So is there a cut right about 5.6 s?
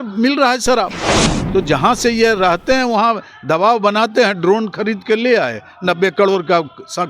no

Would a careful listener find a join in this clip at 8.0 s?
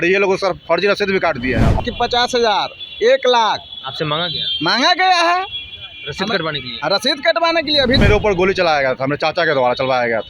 yes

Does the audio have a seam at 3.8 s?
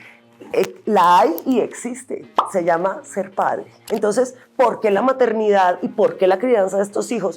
yes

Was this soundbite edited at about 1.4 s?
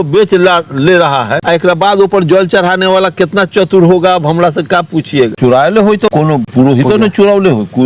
yes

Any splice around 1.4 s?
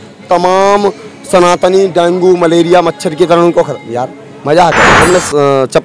no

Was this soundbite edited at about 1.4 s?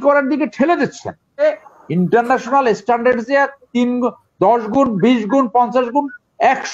yes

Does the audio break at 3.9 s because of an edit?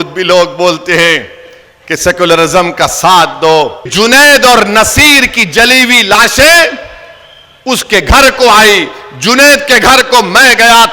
yes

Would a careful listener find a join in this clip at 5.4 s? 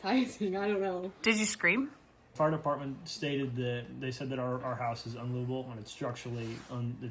no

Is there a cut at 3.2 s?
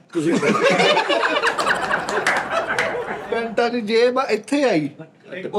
yes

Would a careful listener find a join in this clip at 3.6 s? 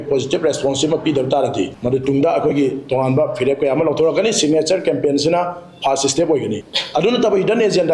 no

